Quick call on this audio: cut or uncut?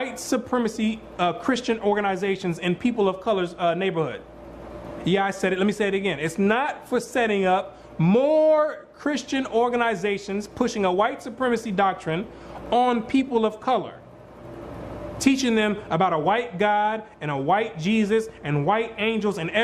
cut